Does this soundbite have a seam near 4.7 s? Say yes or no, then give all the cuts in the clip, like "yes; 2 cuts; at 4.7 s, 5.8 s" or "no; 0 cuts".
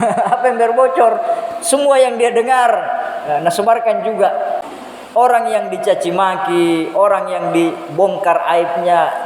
yes; 1 cut; at 4.7 s